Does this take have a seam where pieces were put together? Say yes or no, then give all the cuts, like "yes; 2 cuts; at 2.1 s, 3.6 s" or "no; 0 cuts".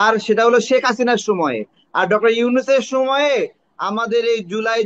no; 0 cuts